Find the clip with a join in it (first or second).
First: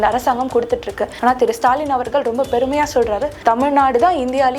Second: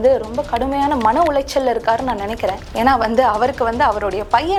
first